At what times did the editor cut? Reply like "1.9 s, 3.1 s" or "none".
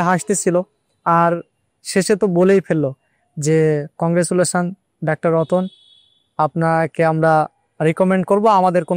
4.0 s